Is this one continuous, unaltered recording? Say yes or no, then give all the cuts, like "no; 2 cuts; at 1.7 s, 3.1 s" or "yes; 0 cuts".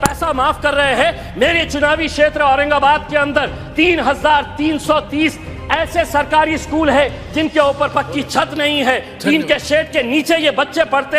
yes; 0 cuts